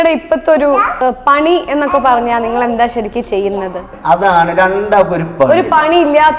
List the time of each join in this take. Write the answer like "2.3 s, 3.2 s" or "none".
0.9 s, 3.9 s